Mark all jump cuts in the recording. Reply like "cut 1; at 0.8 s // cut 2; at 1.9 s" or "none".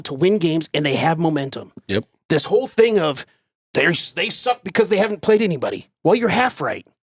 none